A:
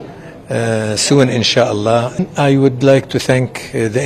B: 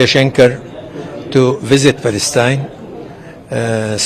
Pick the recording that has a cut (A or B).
A